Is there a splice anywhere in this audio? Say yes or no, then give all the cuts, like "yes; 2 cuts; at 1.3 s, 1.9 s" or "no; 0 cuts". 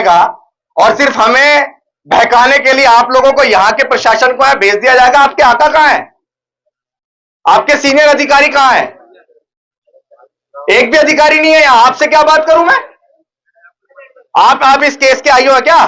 no; 0 cuts